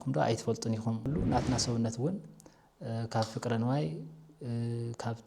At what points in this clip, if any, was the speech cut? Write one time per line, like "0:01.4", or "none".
0:01.1